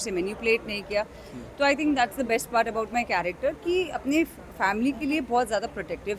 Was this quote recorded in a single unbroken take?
yes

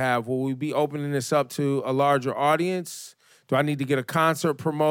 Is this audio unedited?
no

